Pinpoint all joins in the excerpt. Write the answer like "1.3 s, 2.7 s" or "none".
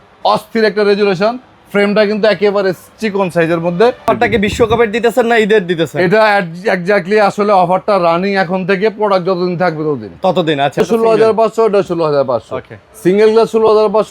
4.1 s, 10.8 s